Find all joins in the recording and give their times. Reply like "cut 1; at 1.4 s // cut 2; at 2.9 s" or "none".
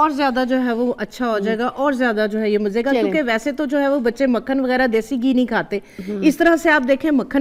none